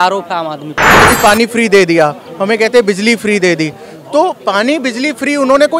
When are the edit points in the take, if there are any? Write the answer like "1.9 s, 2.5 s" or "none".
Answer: 1.1 s